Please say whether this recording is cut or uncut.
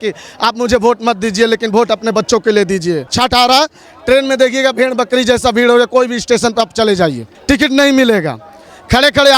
cut